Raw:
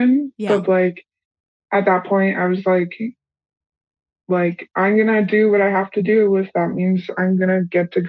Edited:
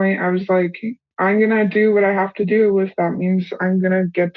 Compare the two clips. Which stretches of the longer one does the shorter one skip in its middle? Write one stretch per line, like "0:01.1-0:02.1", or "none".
0:03.2-0:04.6